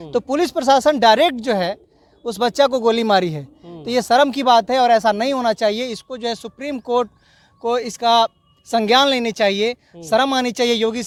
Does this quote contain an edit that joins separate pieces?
no; 0 cuts

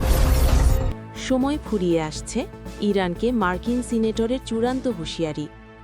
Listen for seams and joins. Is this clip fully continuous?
yes; 0 cuts

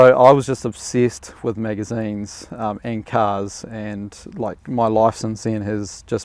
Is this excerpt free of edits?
yes; 0 cuts

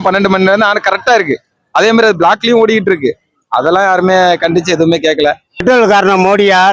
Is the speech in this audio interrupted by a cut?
yes; 1 cut; at 5.6 s

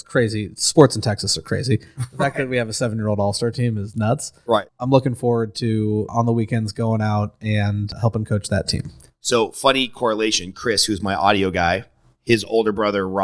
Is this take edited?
no; 0 cuts

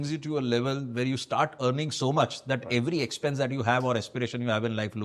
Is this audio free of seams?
yes; 0 cuts

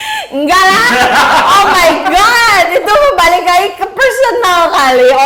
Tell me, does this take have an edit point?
no; 0 cuts

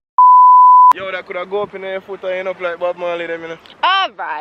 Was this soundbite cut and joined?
yes; 1 cut; at 0.9 s

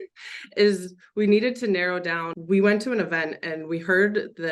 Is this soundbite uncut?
no; 1 cut; at 2.3 s

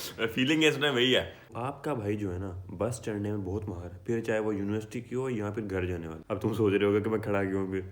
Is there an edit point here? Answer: yes; 2 cuts; at 1.5 s, 6.1 s

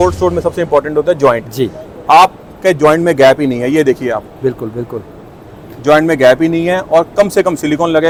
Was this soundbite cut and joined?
no; 0 cuts

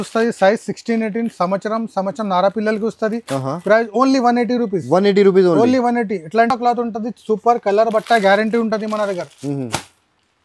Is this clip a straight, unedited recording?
yes; 0 cuts

